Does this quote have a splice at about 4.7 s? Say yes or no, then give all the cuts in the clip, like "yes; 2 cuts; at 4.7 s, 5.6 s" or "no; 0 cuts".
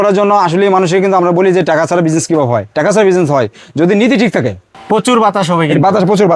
yes; 1 cut; at 4.7 s